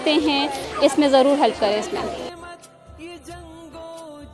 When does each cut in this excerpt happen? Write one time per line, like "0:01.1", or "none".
none